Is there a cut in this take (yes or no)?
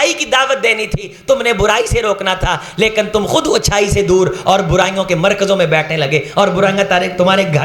no